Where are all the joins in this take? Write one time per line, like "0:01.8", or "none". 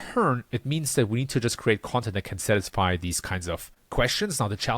0:03.7